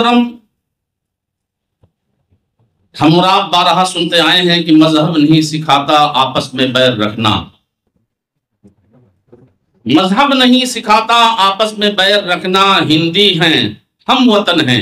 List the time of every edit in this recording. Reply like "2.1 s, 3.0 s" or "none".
none